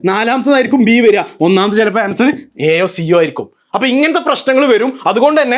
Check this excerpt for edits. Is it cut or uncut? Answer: uncut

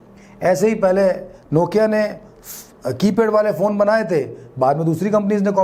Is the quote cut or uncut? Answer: uncut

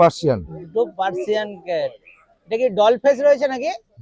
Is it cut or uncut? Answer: uncut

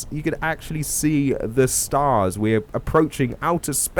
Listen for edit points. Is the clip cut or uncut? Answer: uncut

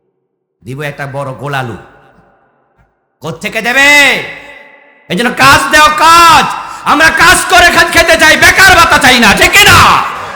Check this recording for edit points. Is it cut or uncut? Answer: uncut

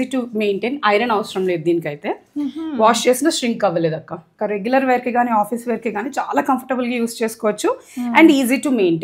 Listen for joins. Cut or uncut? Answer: cut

